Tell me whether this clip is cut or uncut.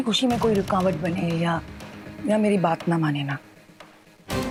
uncut